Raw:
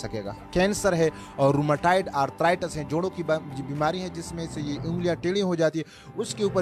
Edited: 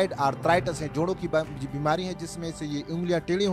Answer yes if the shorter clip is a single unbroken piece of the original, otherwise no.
yes